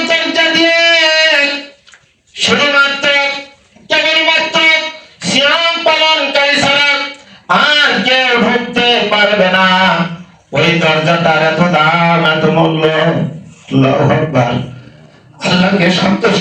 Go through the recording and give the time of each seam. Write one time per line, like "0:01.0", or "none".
none